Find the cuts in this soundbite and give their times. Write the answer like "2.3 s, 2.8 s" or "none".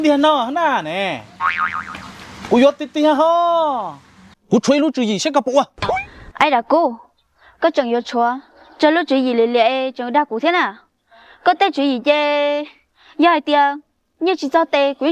4.3 s